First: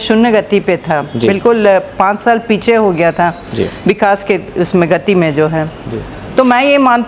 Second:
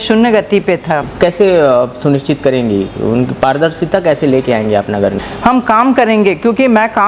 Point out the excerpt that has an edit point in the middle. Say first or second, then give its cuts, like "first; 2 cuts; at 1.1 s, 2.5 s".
second; 2 cuts; at 1.1 s, 5.2 s